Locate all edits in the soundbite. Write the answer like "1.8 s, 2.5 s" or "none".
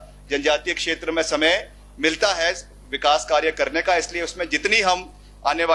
none